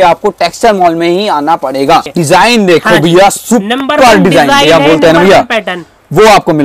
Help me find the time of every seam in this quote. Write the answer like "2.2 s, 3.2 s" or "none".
2.1 s